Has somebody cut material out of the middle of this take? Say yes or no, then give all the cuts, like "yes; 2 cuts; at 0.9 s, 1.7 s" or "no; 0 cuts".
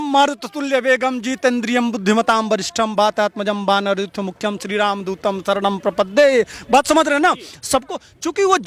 no; 0 cuts